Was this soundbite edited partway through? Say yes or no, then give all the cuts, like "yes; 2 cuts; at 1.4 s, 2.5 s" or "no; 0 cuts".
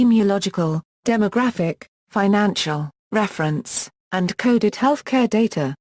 yes; 1 cut; at 3.0 s